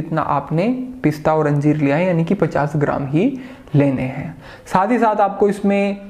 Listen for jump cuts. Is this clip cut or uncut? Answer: uncut